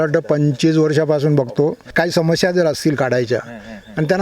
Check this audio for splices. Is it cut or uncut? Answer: cut